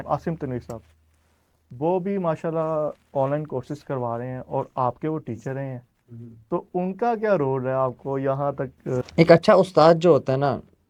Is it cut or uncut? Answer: uncut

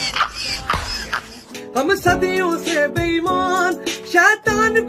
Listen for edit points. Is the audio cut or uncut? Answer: cut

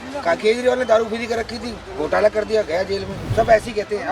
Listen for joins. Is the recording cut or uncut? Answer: cut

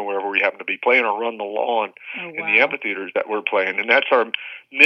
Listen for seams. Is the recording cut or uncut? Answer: uncut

